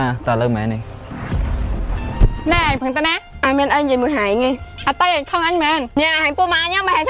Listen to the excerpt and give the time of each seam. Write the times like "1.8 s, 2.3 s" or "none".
2.4 s